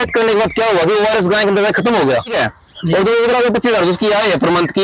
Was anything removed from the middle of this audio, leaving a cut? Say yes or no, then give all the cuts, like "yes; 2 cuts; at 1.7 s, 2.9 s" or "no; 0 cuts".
yes; 1 cut; at 2.3 s